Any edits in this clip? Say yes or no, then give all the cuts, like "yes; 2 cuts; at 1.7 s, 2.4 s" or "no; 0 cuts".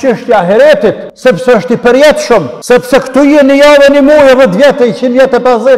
yes; 2 cuts; at 1.1 s, 2.5 s